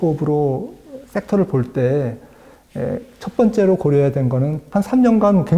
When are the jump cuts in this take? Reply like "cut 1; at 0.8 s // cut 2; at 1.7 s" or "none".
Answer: cut 1; at 4.6 s